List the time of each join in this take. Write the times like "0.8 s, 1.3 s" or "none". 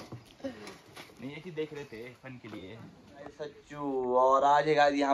3.6 s

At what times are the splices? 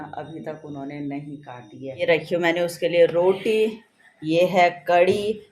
2.0 s

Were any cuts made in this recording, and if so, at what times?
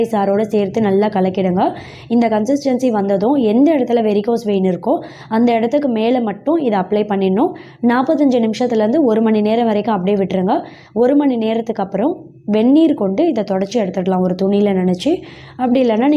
none

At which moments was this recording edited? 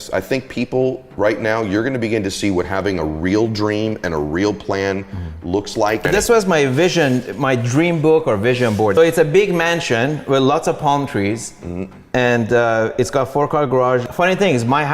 6.1 s, 8.9 s, 14.1 s

